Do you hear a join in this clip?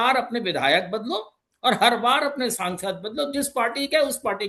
no; 0 cuts

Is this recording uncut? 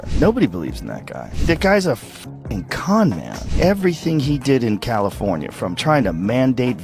yes; 0 cuts

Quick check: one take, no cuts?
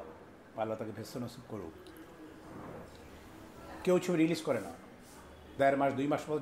yes; 0 cuts

